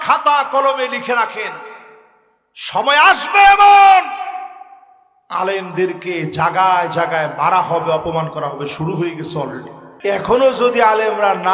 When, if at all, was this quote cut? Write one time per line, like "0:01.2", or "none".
0:09.9